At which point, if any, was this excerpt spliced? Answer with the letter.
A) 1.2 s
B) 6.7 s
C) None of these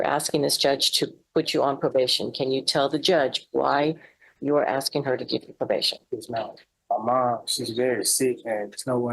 B